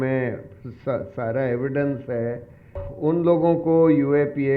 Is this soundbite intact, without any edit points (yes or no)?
no